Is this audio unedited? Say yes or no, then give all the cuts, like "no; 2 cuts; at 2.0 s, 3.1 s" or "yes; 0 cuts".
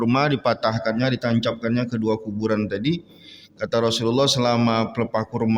yes; 0 cuts